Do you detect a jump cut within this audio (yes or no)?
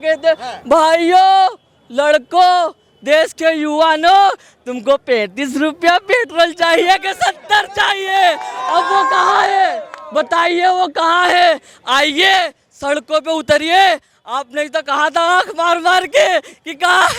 no